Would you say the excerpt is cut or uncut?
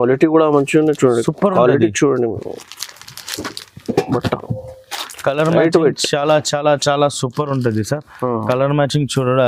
uncut